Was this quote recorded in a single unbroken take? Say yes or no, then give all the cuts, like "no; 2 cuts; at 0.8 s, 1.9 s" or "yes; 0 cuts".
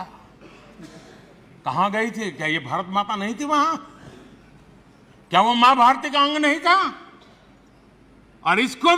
yes; 0 cuts